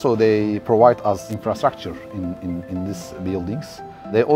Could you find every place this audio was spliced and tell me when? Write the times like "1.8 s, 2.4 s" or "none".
1.3 s